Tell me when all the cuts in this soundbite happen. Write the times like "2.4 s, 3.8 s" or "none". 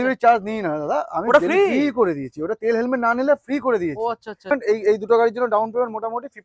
4.5 s